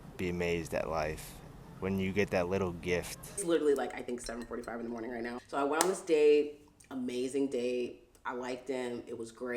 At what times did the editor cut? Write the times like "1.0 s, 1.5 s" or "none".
3.4 s, 5.4 s